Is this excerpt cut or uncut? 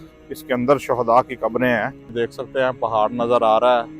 cut